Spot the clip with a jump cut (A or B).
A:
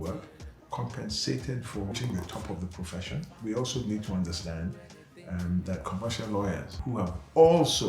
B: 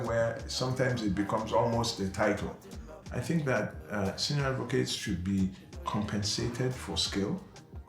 A